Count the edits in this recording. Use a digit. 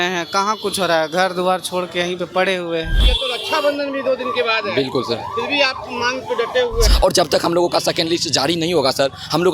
2